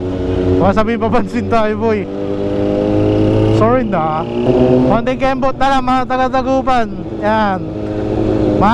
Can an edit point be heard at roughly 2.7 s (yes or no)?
no